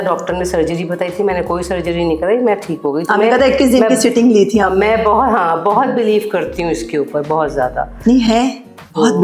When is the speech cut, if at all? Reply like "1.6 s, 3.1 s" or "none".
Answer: none

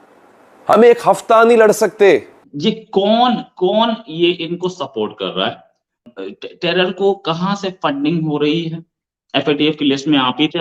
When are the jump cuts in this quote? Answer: 2.4 s, 6.1 s

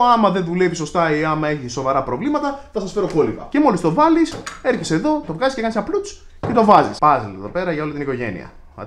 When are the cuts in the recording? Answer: 3.4 s, 6.9 s

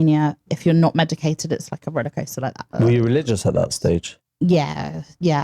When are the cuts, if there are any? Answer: 2.7 s

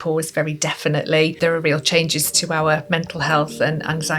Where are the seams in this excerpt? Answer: 1.4 s

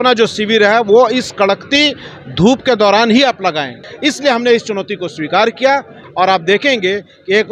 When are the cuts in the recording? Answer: 3.8 s, 6.0 s

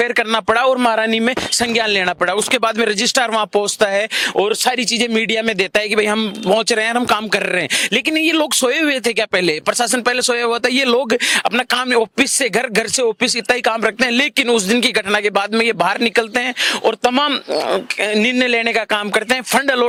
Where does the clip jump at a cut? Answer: none

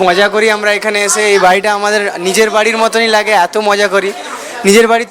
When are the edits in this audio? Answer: none

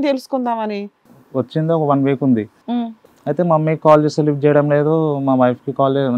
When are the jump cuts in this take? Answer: 1.0 s, 2.7 s

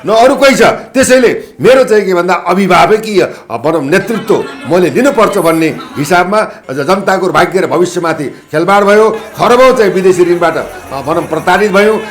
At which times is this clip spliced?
6.6 s

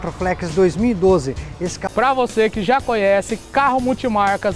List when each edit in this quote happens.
1.8 s

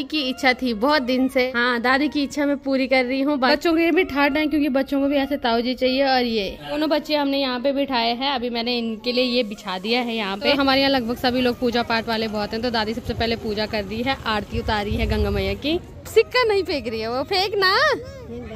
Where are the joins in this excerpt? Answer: 1.5 s, 3.5 s, 6.8 s, 10.6 s, 16.0 s

